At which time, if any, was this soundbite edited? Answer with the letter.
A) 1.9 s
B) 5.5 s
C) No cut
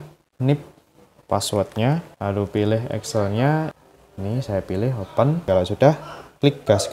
B